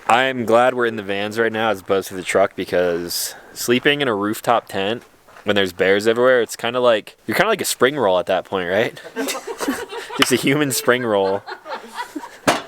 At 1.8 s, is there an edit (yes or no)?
no